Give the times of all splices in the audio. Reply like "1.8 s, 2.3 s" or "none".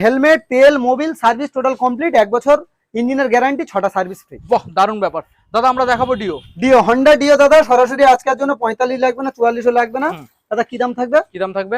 none